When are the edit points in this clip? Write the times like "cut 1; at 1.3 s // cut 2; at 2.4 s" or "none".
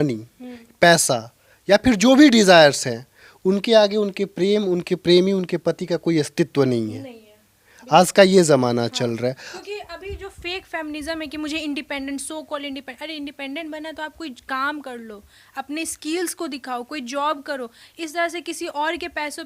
none